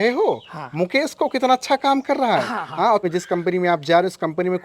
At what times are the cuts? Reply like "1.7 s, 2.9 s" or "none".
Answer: 3.0 s